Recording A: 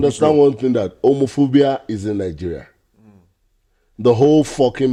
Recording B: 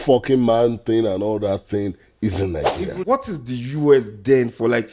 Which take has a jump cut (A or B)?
B